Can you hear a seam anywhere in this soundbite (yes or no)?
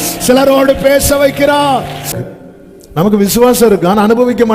yes